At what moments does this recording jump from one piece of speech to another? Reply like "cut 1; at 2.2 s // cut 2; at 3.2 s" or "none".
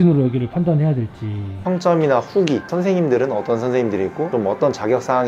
cut 1; at 1.6 s